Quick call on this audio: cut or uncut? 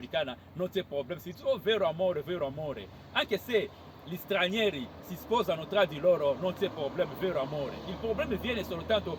uncut